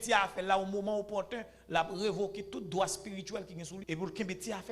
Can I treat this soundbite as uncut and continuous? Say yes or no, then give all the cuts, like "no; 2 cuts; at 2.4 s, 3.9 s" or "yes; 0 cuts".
no; 1 cut; at 3.8 s